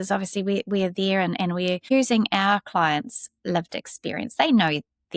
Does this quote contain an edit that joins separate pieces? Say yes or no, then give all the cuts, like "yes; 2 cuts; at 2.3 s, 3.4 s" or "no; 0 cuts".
yes; 1 cut; at 1.9 s